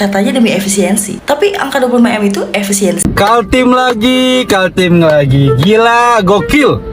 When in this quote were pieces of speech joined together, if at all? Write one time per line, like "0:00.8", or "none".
0:03.0